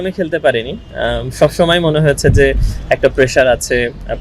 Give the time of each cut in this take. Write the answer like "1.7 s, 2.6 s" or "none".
none